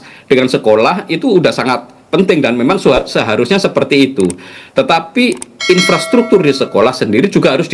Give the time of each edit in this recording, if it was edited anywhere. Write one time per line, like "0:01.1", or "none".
none